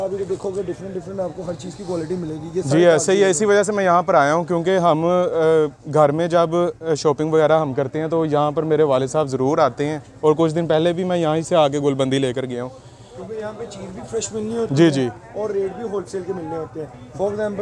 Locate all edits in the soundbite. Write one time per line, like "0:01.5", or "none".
none

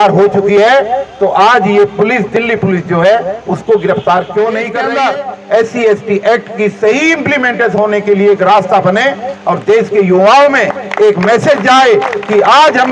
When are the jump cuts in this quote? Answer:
0:04.8

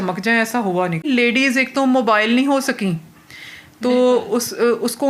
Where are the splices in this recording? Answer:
0:01.1

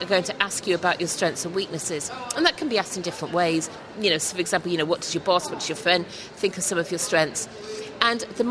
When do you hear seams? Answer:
none

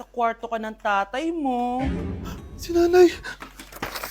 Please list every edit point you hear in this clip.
none

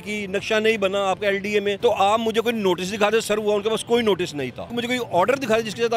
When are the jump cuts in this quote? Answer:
0:01.8
0:04.8

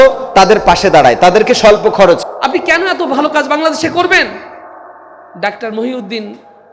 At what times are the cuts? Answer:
0:02.2

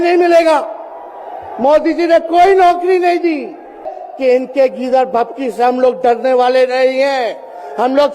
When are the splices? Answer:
0:04.0

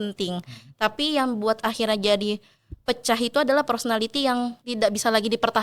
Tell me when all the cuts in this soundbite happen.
0:04.6

